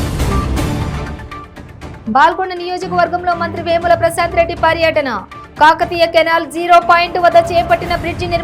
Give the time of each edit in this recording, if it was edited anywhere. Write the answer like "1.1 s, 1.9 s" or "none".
none